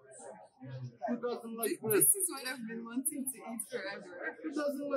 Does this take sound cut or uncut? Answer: uncut